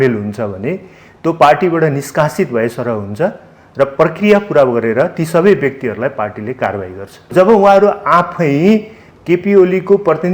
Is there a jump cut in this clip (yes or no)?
yes